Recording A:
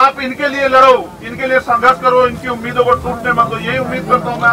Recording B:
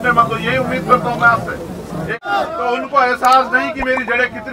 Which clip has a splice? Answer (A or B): B